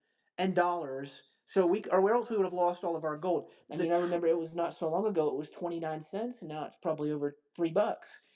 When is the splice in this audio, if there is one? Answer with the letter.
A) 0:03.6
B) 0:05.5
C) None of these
A